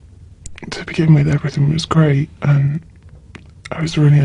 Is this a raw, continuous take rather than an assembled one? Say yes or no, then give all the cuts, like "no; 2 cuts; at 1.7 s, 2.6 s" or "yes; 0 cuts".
no; 1 cut; at 2.3 s